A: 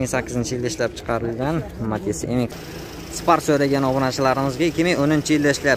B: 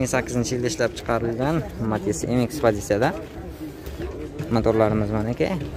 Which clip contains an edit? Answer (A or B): A